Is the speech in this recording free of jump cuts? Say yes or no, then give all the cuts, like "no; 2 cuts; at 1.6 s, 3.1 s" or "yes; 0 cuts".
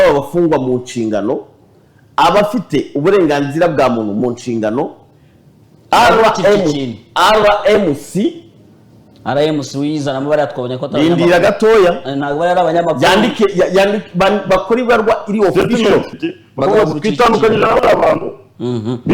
no; 1 cut; at 16.1 s